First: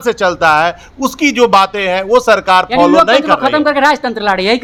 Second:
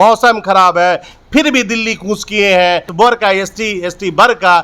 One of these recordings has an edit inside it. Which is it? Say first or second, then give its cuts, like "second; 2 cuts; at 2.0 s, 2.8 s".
second; 1 cut; at 2.9 s